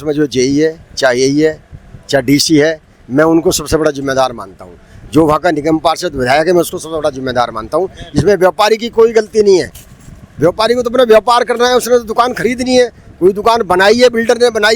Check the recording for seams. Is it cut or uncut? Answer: uncut